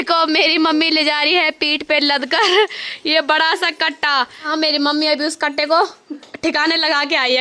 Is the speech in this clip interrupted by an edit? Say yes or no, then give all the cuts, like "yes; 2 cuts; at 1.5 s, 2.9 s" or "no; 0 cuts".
yes; 1 cut; at 4.5 s